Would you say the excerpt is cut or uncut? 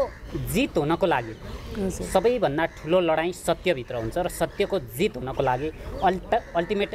uncut